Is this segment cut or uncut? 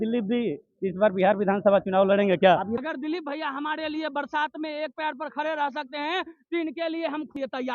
cut